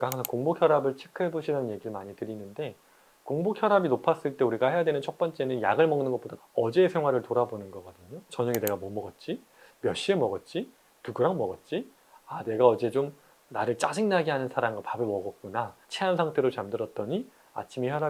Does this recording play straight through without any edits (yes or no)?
no